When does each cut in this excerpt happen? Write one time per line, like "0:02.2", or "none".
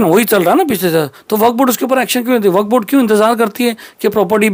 none